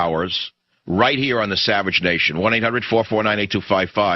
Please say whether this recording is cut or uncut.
uncut